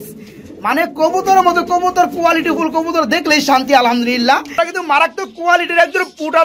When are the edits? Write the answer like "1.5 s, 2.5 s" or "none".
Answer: 4.5 s